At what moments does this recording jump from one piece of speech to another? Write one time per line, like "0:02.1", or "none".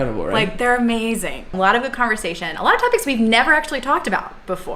0:01.4